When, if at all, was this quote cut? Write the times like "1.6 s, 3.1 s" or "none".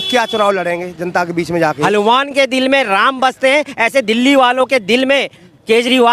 1.8 s